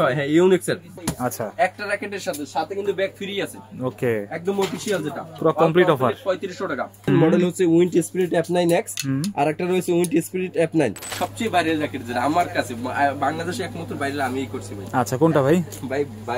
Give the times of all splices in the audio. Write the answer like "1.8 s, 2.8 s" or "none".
0.9 s, 7.1 s, 11.1 s